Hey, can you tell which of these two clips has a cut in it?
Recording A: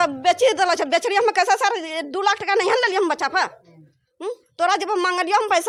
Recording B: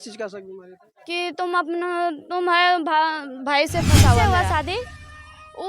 B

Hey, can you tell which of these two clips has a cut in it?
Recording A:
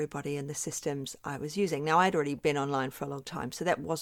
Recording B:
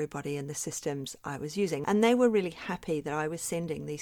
B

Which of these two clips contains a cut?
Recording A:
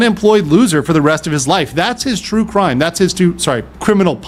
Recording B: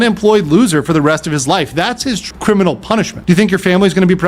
B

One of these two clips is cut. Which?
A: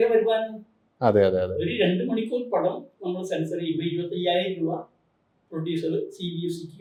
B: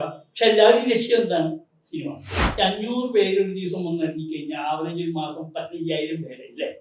B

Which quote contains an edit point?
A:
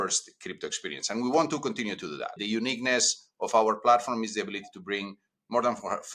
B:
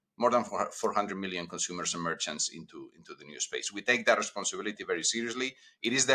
A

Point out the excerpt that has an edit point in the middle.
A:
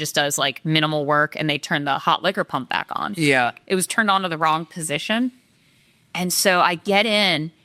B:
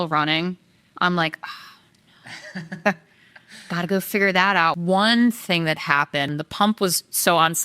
B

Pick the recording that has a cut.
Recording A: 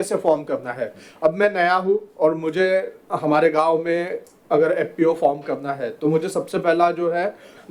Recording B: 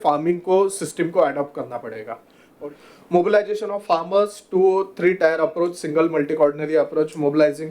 B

